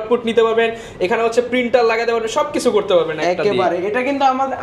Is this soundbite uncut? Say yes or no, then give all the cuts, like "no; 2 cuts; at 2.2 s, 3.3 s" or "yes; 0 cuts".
yes; 0 cuts